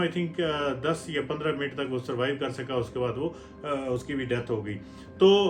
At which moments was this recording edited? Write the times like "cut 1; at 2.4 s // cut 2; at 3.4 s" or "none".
none